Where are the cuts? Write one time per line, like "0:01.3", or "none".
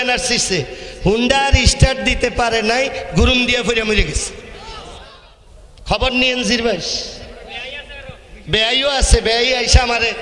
0:05.2